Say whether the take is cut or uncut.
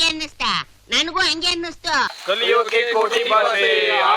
cut